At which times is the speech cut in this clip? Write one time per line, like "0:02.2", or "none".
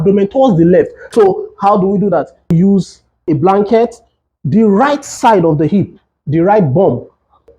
0:01.0